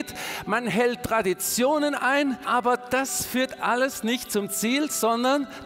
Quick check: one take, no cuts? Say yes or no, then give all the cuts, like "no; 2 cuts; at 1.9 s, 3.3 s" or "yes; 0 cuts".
no; 1 cut; at 2.4 s